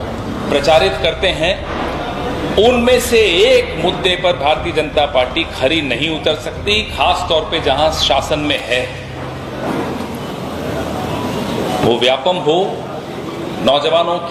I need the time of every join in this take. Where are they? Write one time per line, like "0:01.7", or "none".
none